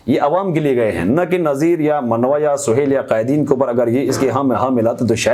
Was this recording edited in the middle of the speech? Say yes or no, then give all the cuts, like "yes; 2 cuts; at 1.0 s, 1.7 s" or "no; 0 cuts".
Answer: no; 0 cuts